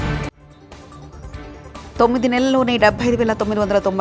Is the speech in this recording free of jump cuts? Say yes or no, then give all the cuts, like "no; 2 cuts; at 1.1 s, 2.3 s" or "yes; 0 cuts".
no; 1 cut; at 1.8 s